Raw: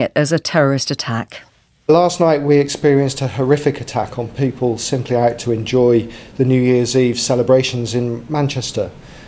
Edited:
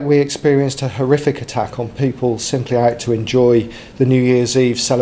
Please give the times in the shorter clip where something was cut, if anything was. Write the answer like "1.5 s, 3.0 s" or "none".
none